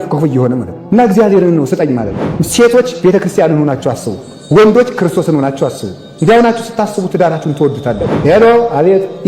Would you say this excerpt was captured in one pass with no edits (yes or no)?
no